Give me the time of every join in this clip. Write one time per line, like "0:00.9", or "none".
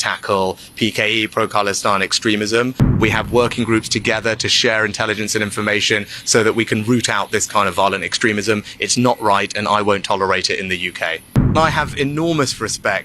0:03.0
0:11.5

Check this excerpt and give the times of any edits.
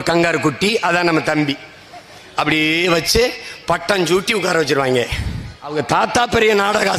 0:05.7

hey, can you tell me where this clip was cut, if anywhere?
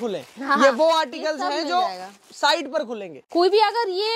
0:03.2

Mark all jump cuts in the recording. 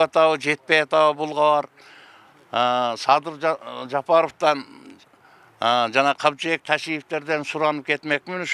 none

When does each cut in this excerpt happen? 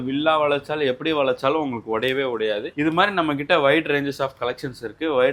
none

